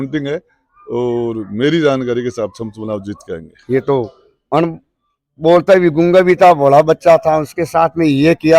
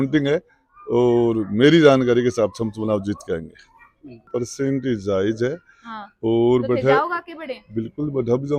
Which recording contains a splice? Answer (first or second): first